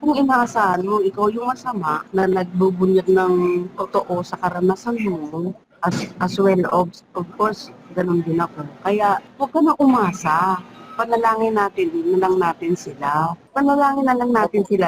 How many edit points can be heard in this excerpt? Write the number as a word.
four